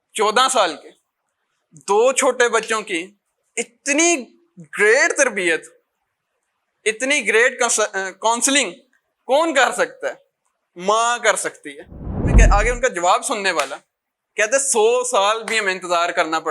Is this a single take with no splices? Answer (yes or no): no